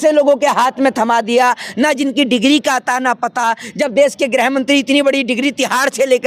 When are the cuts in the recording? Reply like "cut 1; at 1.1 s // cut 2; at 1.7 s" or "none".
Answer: none